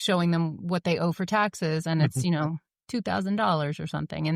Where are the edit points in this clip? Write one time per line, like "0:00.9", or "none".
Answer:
none